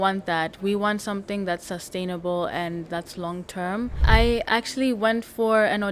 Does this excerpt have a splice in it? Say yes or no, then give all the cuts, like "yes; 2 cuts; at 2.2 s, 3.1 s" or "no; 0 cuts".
yes; 1 cut; at 4.0 s